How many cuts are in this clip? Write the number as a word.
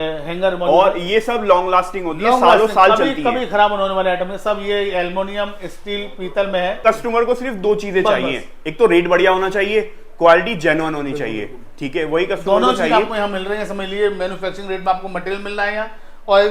one